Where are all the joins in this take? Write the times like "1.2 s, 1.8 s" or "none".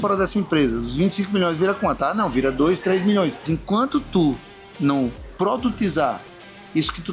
3.4 s